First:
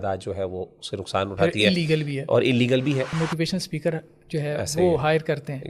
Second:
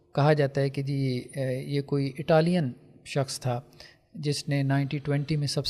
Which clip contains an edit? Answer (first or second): first